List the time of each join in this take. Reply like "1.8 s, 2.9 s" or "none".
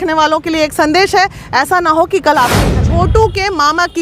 2.8 s

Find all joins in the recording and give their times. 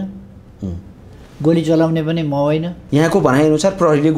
2.8 s

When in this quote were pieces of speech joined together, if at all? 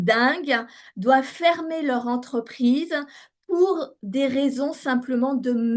none

